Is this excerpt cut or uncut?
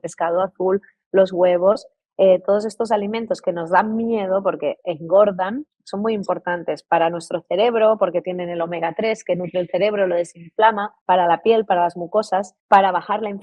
cut